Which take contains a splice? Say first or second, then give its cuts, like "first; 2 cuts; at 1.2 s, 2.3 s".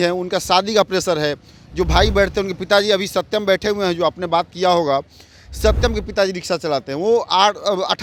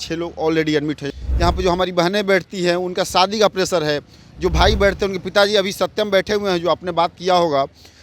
second; 1 cut; at 1.1 s